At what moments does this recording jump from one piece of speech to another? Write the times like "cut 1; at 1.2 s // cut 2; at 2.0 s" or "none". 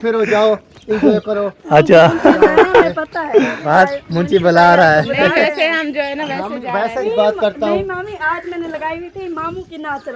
cut 1; at 3.6 s // cut 2; at 7.0 s

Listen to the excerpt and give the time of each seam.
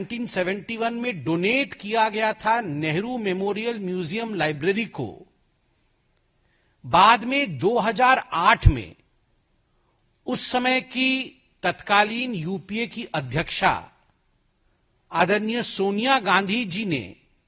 none

